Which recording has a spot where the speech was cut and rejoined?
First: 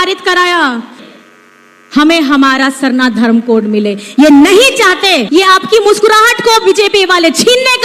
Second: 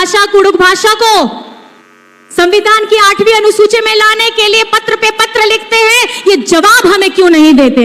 first; 2 cuts; at 1.0 s, 5.2 s

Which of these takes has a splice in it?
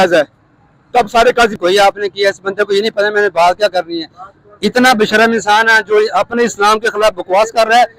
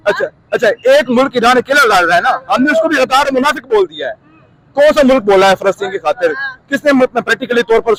first; 1 cut; at 1.6 s

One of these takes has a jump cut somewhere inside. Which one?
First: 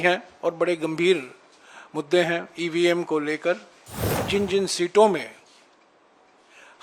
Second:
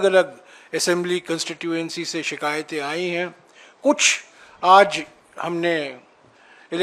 first; 1 cut; at 4.2 s

